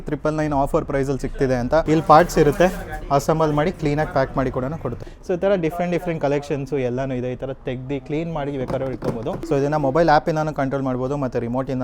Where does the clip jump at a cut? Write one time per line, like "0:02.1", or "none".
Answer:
0:01.8
0:05.1
0:09.4